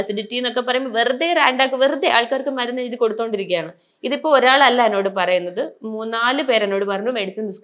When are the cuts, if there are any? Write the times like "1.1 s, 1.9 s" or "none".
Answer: none